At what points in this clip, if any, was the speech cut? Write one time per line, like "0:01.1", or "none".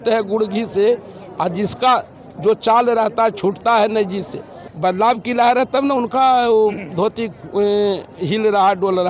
0:04.6

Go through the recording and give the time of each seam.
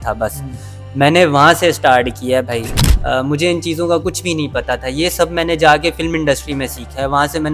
0:02.9

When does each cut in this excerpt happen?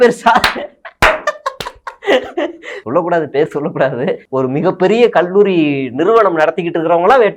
0:02.7
0:04.2

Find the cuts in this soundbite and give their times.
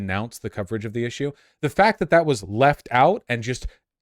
none

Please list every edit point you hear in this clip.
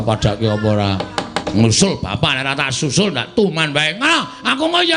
0:01.4

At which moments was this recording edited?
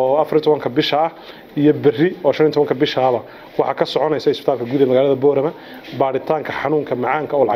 none

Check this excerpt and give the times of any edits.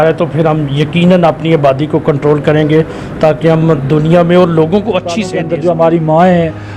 0:05.3

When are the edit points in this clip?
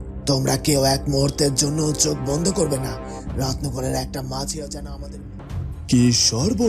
0:05.5

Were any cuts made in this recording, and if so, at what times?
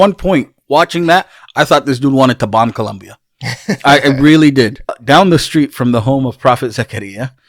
0:05.0

